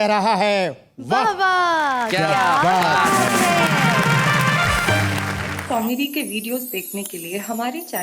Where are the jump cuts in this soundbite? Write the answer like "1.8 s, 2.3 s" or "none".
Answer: 5.5 s

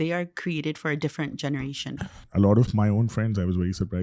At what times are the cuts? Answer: 2.2 s

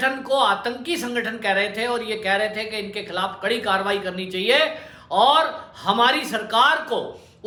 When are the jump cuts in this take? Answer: none

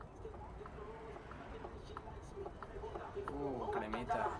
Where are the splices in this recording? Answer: none

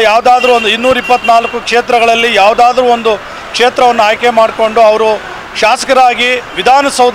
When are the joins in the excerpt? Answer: none

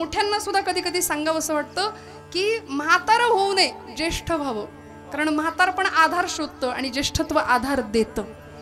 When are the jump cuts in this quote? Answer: none

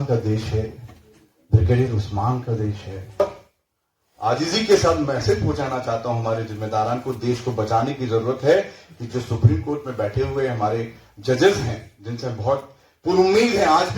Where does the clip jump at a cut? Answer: 3.2 s

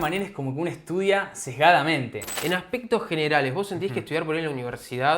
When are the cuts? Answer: 2.3 s

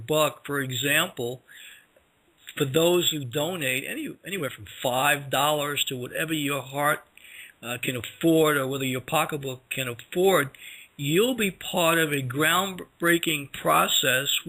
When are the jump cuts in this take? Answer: 6.1 s

